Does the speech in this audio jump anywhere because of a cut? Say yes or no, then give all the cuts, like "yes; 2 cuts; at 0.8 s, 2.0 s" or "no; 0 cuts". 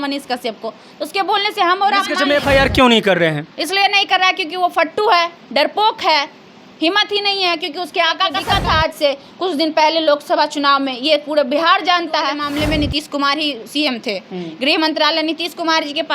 yes; 3 cuts; at 2.2 s, 8.4 s, 12.4 s